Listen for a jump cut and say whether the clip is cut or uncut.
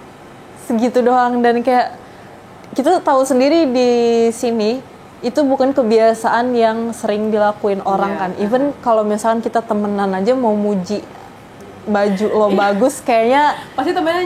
uncut